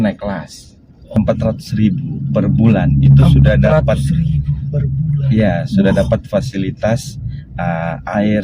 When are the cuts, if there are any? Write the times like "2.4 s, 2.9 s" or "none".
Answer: 1.2 s